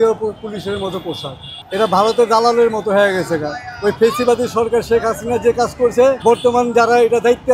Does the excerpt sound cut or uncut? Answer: uncut